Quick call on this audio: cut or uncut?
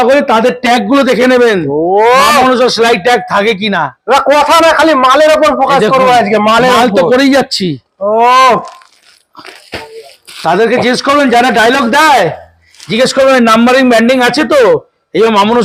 uncut